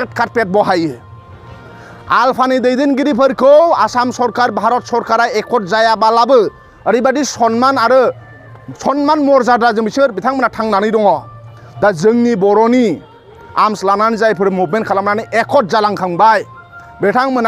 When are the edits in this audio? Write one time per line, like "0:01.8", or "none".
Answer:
none